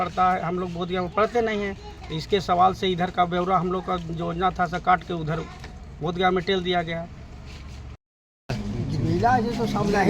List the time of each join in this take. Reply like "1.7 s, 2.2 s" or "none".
8.1 s